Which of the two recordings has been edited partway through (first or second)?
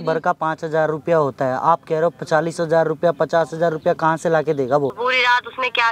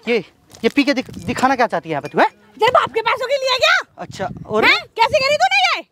first